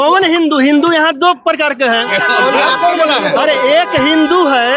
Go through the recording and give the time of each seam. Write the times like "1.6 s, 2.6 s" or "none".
none